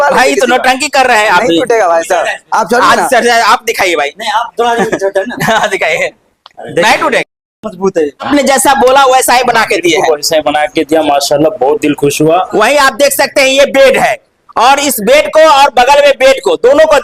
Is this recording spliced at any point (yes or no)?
yes